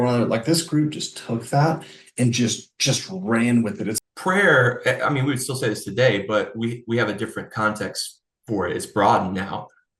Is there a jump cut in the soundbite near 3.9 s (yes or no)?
yes